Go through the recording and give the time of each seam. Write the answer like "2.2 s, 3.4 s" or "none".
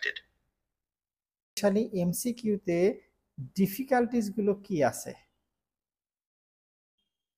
1.6 s